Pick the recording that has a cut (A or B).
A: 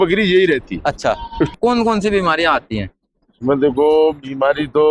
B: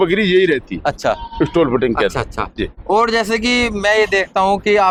A